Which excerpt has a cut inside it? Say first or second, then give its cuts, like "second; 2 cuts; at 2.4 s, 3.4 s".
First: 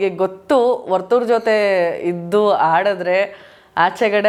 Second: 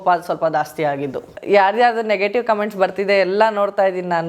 second; 1 cut; at 1.4 s